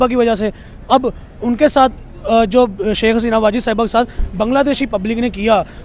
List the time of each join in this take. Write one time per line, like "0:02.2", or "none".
none